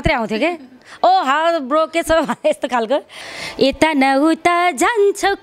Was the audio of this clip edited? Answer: yes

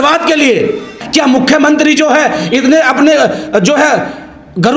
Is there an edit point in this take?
yes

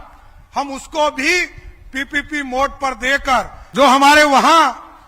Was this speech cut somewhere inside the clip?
yes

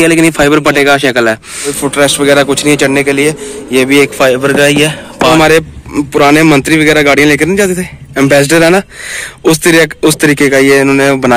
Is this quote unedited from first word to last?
no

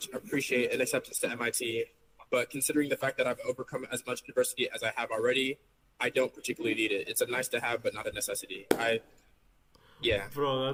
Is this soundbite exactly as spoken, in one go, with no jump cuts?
yes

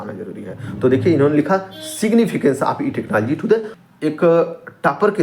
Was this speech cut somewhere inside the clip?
yes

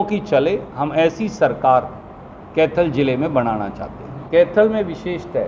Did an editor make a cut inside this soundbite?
yes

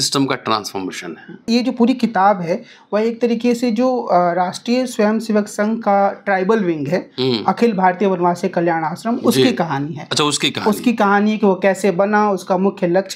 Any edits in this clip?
yes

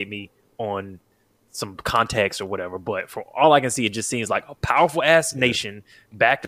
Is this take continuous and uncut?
yes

